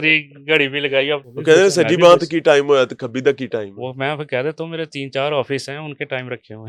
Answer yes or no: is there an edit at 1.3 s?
yes